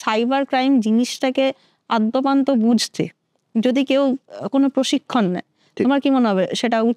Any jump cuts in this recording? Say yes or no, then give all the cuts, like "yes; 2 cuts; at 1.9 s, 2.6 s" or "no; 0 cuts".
no; 0 cuts